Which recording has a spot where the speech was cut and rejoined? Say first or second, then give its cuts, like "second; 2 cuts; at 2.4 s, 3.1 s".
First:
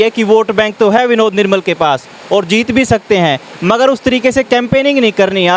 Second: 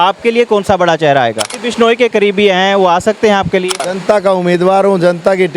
second; 2 cuts; at 1.5 s, 3.9 s